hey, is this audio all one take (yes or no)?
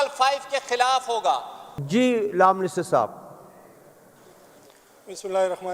yes